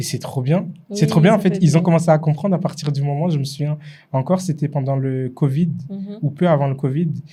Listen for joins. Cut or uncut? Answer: uncut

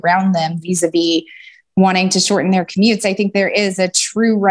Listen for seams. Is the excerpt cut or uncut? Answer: cut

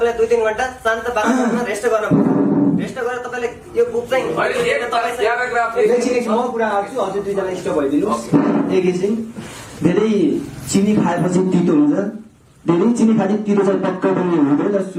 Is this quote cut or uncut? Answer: uncut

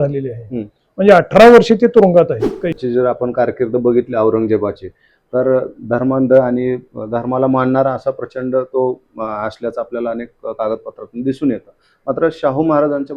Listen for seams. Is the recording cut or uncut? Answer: cut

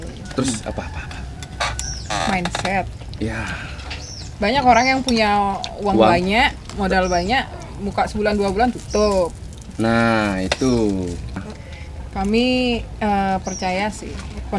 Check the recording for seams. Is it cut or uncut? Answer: cut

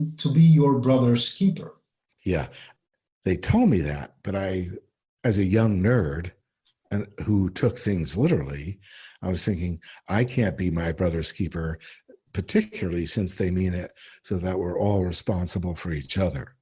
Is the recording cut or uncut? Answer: cut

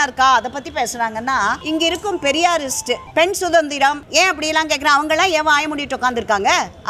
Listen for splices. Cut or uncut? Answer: cut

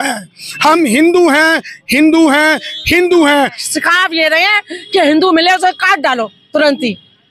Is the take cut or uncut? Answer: cut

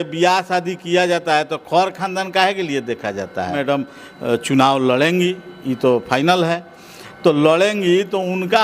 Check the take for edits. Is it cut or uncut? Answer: cut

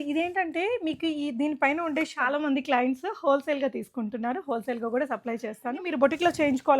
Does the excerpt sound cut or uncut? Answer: cut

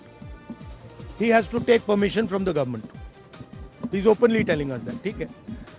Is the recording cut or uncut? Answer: uncut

